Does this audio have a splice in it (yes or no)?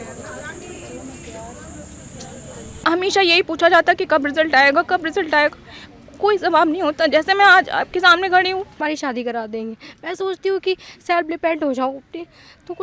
yes